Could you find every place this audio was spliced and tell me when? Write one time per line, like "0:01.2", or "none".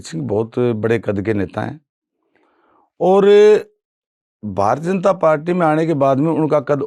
none